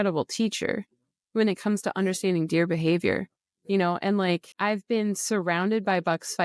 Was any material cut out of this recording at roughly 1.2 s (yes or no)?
no